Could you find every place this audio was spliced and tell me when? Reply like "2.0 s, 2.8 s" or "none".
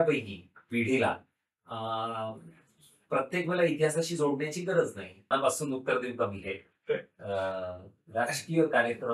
5.3 s